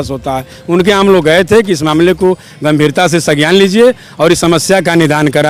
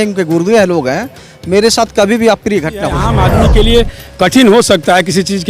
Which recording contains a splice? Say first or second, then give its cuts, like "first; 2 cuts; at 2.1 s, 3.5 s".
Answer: second; 1 cut; at 3.1 s